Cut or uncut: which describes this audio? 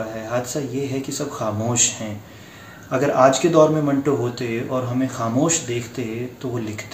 uncut